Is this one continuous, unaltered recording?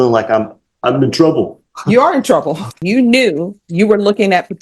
no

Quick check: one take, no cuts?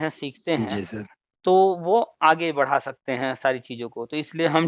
yes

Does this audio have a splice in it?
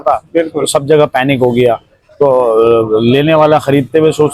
no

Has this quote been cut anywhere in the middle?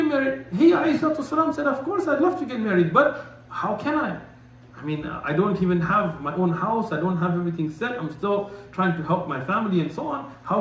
no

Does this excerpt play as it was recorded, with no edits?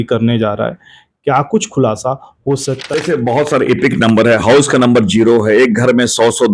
no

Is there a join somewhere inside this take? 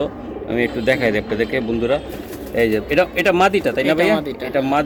no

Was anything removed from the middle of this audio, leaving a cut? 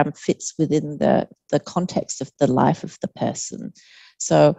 no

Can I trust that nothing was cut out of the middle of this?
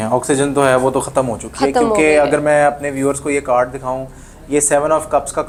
yes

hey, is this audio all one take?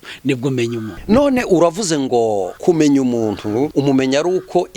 no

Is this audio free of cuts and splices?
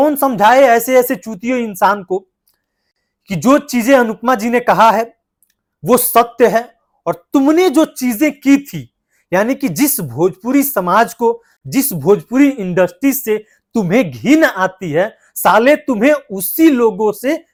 yes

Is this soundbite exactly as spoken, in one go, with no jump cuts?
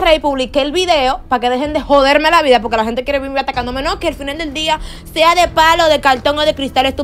yes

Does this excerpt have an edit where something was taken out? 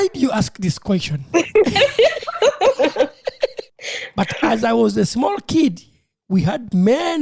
yes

